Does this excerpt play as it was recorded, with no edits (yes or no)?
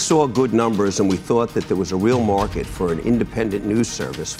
yes